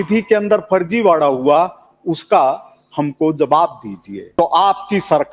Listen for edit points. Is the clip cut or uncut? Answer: cut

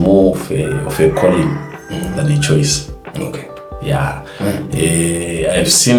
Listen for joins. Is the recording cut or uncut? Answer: uncut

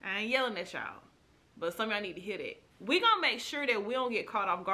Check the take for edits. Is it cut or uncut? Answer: cut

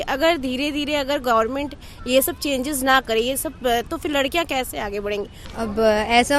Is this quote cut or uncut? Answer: cut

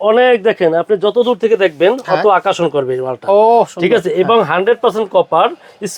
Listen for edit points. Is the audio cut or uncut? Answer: uncut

